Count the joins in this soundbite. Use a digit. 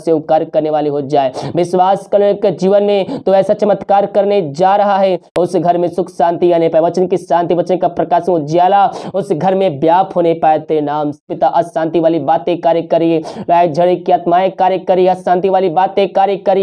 2